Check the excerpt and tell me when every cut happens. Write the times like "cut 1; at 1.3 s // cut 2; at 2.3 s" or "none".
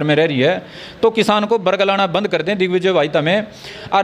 none